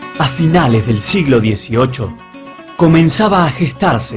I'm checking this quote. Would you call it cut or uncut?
cut